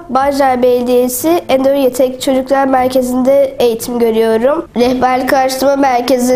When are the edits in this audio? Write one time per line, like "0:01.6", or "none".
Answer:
0:04.7